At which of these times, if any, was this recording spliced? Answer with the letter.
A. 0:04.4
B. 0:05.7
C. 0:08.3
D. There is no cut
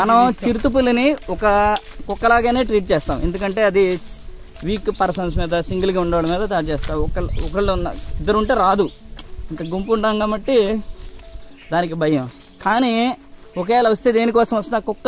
D